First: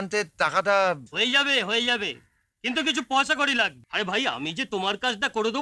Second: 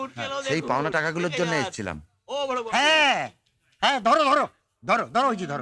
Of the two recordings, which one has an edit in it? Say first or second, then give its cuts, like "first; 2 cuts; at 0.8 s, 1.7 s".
first; 1 cut; at 3.8 s